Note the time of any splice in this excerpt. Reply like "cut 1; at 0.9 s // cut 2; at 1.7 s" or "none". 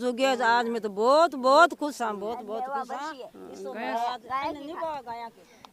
none

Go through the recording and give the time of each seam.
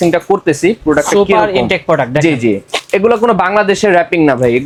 none

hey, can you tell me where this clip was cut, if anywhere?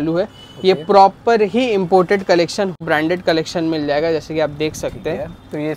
cut 1; at 2.8 s

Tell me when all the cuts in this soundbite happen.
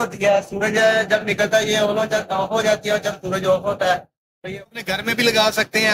cut 1; at 4.6 s

